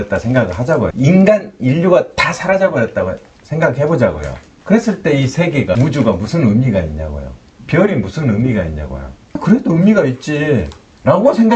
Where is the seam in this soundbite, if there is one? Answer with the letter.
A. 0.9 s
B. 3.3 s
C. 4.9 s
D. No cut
A